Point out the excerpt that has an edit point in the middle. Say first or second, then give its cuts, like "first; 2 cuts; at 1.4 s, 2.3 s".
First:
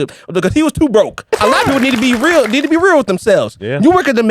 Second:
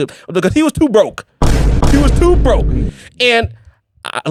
first; 1 cut; at 1.3 s